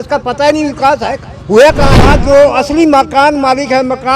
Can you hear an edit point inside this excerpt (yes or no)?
yes